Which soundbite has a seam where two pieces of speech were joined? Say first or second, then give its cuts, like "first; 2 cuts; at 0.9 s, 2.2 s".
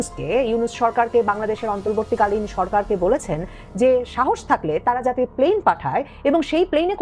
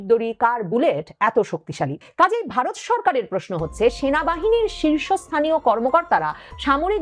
second; 1 cut; at 2.0 s